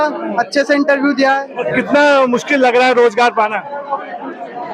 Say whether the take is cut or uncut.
cut